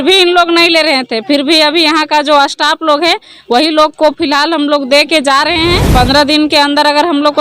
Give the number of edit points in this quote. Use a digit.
1